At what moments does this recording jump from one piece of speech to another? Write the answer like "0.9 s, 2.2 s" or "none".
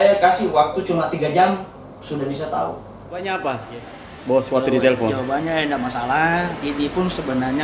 3.2 s